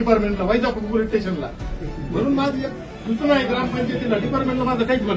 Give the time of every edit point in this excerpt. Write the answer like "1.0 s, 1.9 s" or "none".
1.7 s